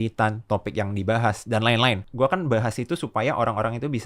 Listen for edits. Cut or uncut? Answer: cut